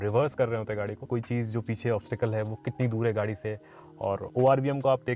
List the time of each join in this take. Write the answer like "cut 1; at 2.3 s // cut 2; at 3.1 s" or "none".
cut 1; at 1.0 s